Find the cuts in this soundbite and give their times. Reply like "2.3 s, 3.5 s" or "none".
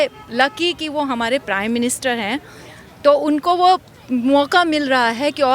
none